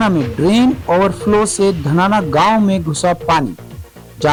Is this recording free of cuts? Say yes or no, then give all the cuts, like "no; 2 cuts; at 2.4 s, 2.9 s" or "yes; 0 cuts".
yes; 0 cuts